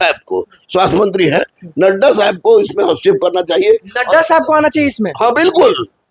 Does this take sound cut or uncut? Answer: uncut